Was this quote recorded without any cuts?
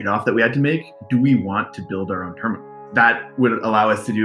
no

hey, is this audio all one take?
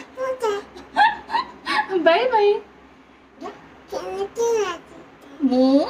no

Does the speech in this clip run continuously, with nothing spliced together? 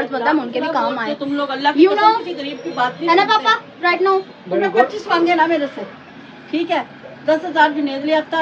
yes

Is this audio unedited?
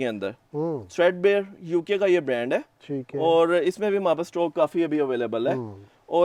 yes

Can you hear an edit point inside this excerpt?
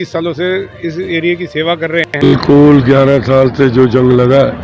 yes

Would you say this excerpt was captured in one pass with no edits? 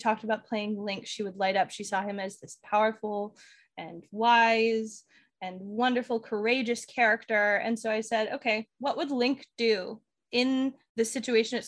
no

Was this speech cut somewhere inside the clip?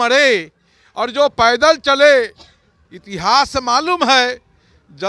no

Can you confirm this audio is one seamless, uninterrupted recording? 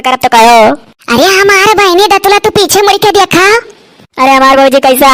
yes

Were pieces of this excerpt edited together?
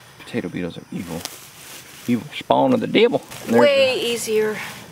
yes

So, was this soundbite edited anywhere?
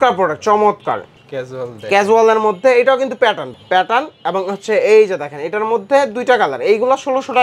yes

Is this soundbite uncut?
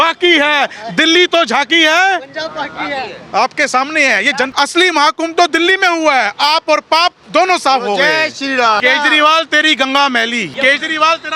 no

